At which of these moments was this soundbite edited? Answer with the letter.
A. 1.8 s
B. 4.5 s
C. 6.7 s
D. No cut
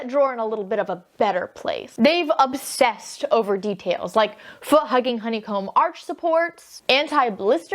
A